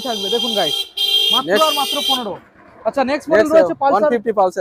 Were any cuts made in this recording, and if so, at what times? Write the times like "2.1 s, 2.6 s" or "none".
none